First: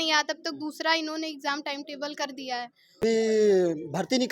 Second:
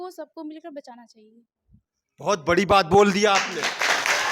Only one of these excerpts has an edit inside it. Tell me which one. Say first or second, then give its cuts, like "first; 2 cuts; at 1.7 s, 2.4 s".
first; 1 cut; at 3.0 s